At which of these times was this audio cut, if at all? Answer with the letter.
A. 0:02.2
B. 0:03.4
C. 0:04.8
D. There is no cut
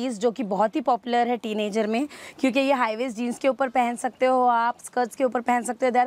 D